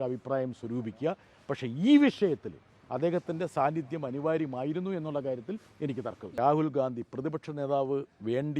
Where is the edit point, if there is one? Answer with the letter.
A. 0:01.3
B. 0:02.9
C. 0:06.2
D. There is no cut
C